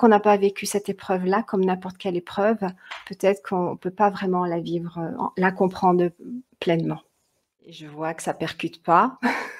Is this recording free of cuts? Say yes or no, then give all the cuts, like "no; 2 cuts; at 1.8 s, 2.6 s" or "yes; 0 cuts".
no; 1 cut; at 7.8 s